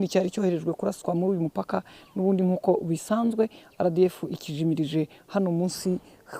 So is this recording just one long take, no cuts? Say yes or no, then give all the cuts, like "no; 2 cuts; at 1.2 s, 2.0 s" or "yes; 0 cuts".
yes; 0 cuts